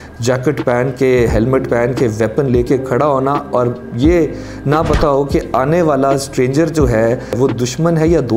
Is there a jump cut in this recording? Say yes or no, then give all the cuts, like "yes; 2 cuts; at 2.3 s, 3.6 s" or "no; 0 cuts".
yes; 1 cut; at 7.3 s